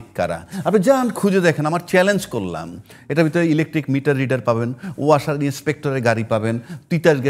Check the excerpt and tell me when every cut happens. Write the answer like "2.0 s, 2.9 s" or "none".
none